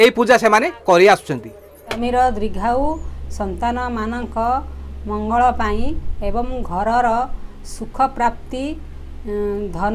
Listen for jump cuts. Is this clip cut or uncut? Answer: cut